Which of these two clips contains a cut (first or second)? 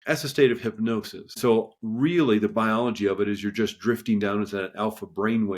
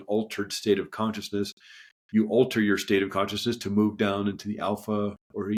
first